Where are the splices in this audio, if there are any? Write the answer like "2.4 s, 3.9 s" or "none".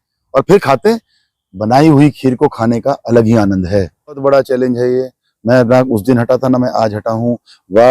4.2 s